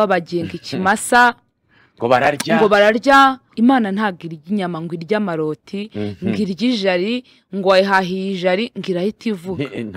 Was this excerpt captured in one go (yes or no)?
no